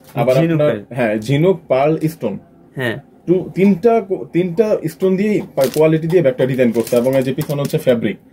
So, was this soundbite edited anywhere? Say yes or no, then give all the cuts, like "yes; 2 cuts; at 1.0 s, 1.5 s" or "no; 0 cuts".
no; 0 cuts